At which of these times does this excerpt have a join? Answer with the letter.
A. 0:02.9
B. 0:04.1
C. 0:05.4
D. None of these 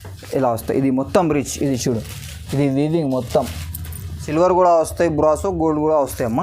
B